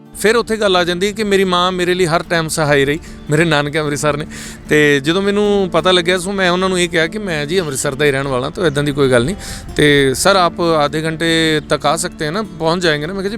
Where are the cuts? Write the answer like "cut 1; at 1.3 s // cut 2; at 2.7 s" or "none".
none